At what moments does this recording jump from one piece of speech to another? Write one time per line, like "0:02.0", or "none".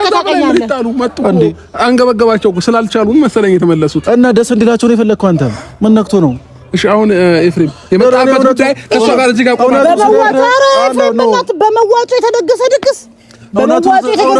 none